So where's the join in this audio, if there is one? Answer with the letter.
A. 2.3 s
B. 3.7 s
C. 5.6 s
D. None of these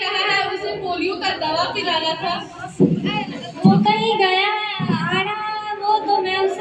D